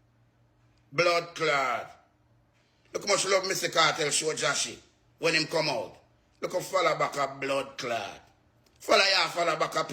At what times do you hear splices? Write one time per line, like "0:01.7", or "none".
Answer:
none